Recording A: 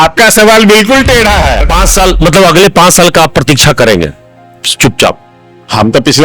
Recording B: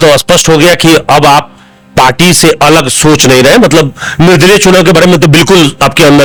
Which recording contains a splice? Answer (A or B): A